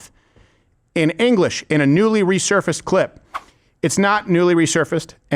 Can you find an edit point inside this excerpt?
no; 0 cuts

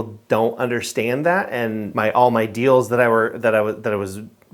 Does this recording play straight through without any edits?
no; 1 cut; at 1.9 s

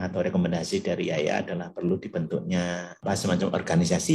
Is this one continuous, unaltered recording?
no; 1 cut; at 3.0 s

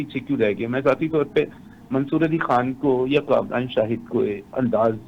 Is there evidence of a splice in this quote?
no; 0 cuts

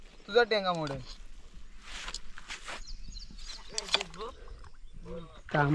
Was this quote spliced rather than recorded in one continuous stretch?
yes; 1 cut; at 4.1 s

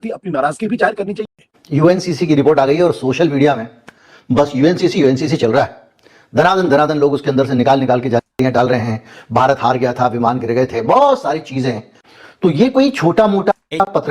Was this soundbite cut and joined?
yes; 1 cut; at 1.3 s

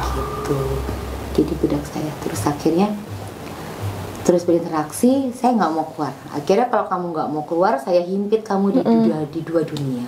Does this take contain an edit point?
no; 0 cuts

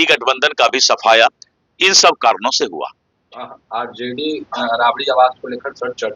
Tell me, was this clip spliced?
no; 0 cuts

